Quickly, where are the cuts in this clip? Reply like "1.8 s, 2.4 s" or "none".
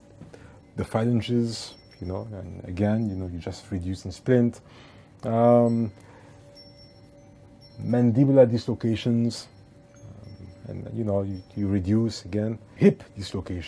12.6 s